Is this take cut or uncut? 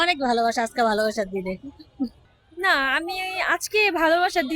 cut